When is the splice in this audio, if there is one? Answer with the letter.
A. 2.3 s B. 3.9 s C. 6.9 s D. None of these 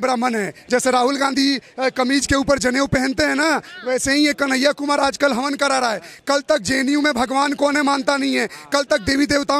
D